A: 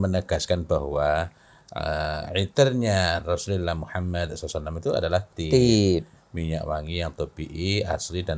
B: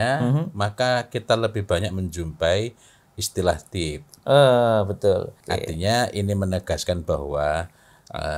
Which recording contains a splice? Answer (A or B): B